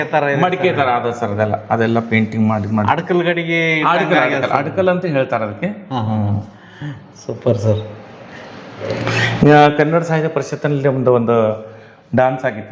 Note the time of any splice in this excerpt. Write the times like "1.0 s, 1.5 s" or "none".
none